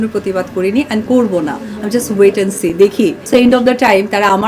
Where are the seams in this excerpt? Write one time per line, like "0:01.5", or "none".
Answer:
0:03.2